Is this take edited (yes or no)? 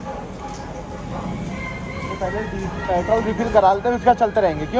no